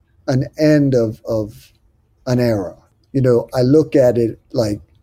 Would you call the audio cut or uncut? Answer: uncut